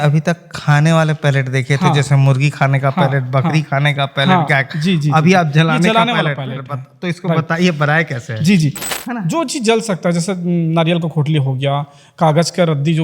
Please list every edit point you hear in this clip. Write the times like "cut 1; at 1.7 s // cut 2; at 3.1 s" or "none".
cut 1; at 8.8 s